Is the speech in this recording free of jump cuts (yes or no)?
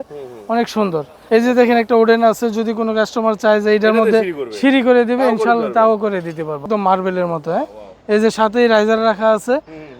no